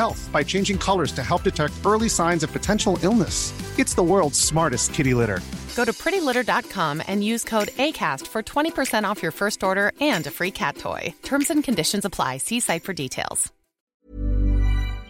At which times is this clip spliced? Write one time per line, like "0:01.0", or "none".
0:13.8